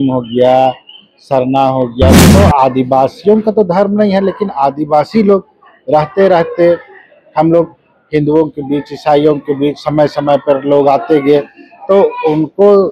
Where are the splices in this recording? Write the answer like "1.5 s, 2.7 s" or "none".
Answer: 2.2 s